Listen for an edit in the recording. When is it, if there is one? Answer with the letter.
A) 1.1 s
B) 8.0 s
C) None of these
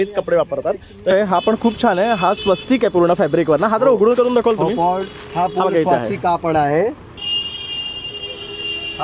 A